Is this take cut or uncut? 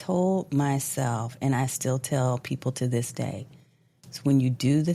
uncut